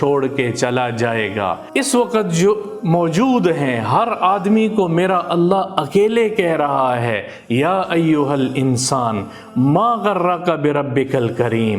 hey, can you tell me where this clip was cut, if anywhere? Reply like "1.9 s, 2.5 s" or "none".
1.6 s